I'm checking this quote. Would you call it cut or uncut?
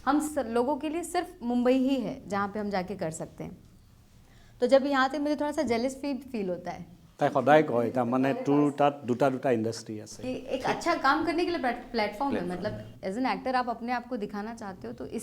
uncut